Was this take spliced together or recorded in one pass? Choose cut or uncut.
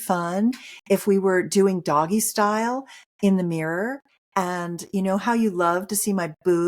uncut